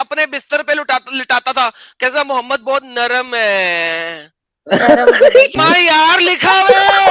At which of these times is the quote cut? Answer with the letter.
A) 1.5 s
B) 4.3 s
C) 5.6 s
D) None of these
C